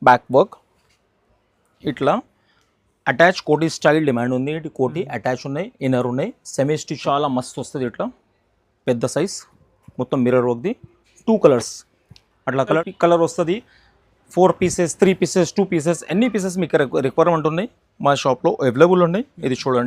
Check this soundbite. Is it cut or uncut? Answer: cut